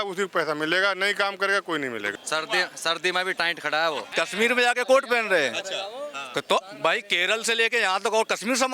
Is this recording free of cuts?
no; 2 cuts; at 2.1 s, 4.1 s

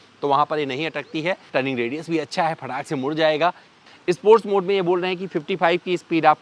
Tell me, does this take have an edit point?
yes; 2 cuts; at 1.4 s, 3.8 s

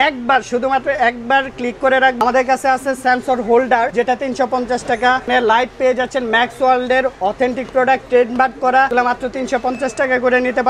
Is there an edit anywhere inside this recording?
yes; 4 cuts; at 2.2 s, 3.9 s, 5.2 s, 8.9 s

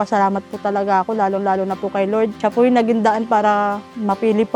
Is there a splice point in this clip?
no; 0 cuts

